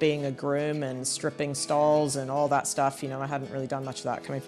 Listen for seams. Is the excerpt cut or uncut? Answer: uncut